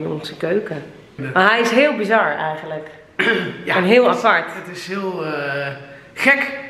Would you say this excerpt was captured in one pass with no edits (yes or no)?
no